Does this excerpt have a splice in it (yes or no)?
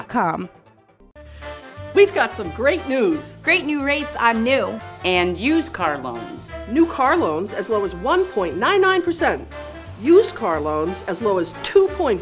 yes